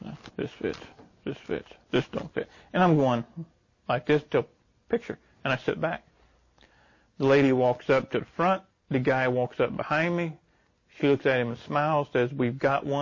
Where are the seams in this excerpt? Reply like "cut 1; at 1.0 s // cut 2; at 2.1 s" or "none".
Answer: none